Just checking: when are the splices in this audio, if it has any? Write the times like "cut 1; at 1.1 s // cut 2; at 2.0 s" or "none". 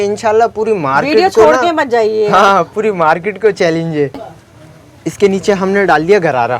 cut 1; at 4.2 s

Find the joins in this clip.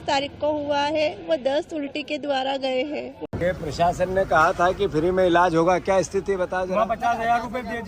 cut 1; at 3.1 s

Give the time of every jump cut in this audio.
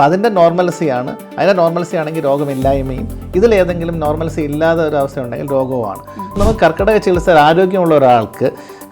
cut 1; at 6.4 s

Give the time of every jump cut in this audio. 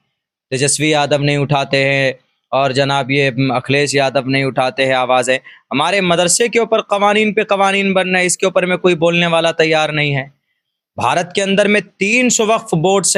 none

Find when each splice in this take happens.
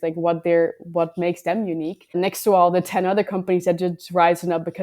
cut 1; at 2.1 s

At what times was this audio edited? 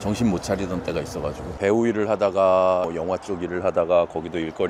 cut 1; at 1.5 s // cut 2; at 2.9 s

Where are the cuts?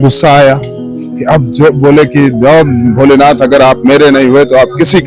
none

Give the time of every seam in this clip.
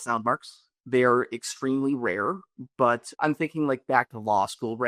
none

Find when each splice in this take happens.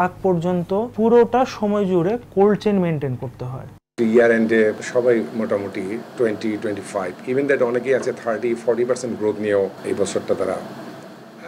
cut 1; at 0.9 s // cut 2; at 3.9 s // cut 3; at 4.8 s // cut 4; at 6.0 s // cut 5; at 9.8 s

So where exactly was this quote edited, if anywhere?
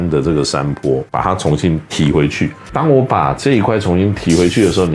cut 1; at 1.1 s // cut 2; at 2.6 s

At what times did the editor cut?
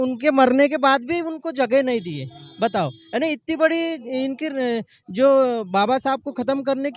none

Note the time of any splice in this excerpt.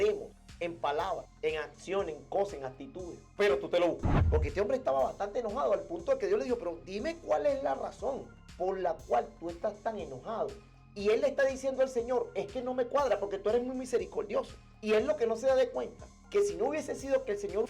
cut 1; at 4.1 s

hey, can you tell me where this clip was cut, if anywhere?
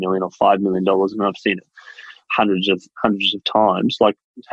none

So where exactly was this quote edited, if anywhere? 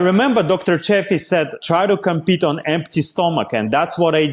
cut 1; at 1.6 s

